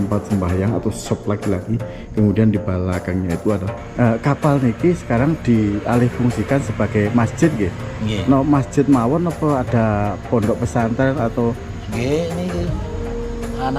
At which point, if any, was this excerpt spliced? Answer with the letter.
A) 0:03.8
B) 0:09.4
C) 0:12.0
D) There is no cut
A